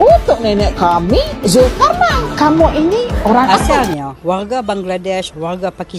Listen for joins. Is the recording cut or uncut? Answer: cut